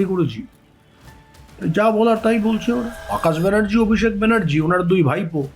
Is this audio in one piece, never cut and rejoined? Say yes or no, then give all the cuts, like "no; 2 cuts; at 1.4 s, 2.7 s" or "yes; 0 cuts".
no; 1 cut; at 3.1 s